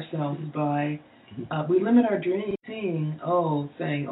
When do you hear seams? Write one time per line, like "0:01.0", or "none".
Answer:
0:02.2